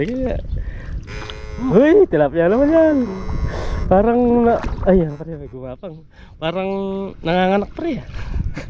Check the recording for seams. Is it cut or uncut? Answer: uncut